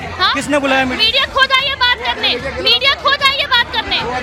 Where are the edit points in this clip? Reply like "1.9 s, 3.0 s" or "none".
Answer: none